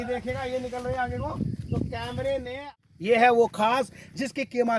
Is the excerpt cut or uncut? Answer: cut